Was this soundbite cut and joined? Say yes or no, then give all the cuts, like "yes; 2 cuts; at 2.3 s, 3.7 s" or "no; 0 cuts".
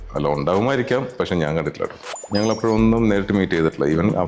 yes; 1 cut; at 2.2 s